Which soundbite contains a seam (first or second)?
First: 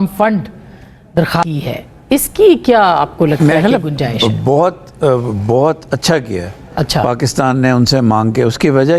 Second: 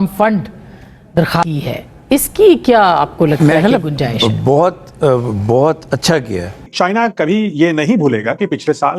second